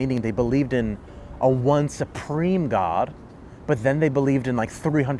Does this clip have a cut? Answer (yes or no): no